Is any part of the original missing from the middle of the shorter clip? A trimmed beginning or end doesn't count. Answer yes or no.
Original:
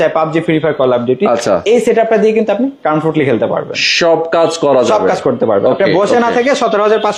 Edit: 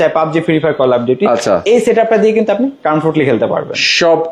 no